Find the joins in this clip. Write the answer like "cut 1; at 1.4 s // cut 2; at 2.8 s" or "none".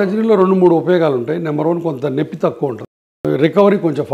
cut 1; at 3.1 s